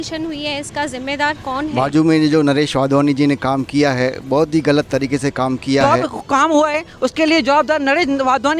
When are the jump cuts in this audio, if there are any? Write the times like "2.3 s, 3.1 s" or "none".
1.7 s, 5.8 s